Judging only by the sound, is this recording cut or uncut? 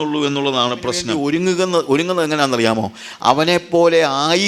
cut